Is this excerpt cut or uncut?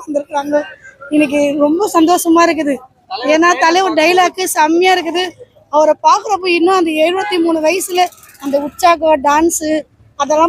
uncut